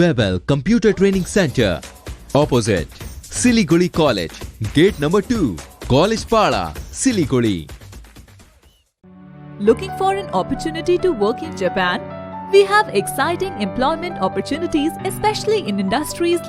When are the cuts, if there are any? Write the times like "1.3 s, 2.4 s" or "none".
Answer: none